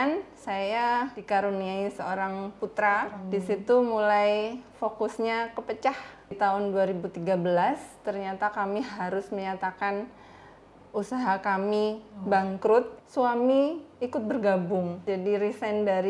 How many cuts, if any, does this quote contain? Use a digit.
6